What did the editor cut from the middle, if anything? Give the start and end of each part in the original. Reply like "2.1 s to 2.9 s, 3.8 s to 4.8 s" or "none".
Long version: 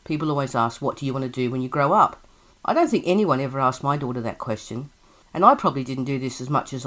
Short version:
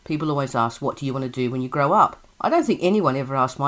2.3 s to 2.5 s